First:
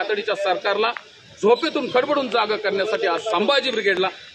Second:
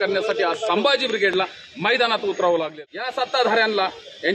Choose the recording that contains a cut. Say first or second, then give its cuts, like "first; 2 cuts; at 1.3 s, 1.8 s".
second; 1 cut; at 2.7 s